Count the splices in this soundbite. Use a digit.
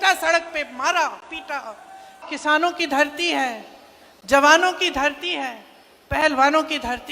1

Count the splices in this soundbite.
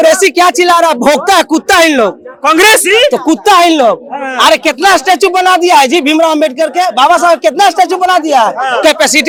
0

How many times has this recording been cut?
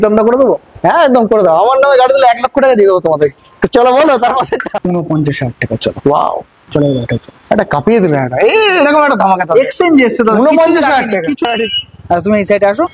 2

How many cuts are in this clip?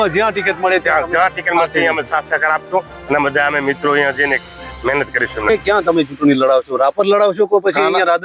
1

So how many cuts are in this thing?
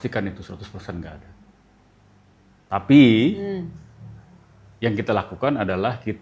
0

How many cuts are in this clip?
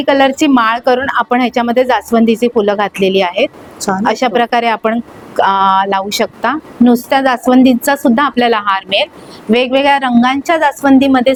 0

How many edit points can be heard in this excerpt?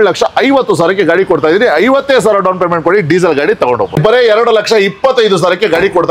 1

